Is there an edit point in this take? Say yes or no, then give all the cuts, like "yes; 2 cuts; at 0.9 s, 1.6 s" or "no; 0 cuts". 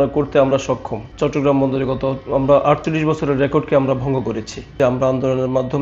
yes; 2 cuts; at 1.0 s, 4.7 s